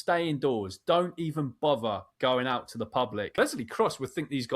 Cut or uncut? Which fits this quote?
cut